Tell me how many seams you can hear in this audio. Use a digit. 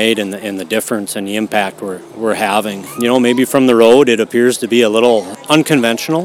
2